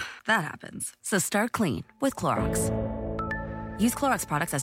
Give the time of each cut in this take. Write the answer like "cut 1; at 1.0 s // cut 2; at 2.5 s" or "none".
cut 1; at 2.4 s // cut 2; at 3.7 s